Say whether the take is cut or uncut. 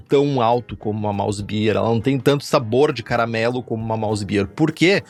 uncut